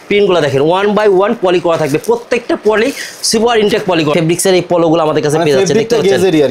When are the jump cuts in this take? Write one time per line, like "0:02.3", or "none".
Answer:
0:04.1